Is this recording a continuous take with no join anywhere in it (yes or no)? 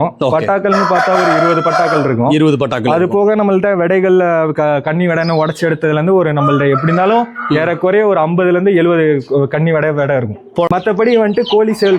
no